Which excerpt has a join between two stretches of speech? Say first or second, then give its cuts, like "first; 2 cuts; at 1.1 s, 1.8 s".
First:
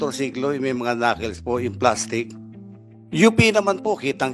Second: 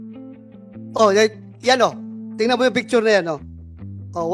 second; 1 cut; at 0.9 s